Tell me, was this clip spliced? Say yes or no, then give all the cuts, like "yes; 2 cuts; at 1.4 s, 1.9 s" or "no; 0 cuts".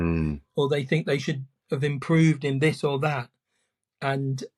no; 0 cuts